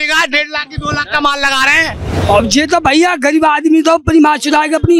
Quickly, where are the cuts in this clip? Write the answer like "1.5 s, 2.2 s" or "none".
2.1 s